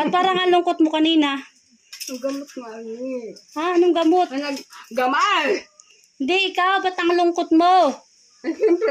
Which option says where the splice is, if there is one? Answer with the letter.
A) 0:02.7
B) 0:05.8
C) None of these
C